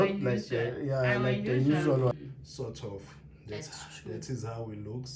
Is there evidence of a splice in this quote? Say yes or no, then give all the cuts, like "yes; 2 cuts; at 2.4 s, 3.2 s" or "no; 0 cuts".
yes; 1 cut; at 2.1 s